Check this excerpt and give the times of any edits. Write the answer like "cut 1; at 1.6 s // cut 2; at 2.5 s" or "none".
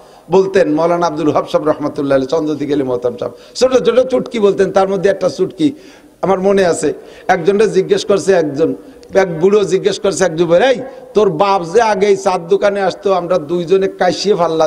none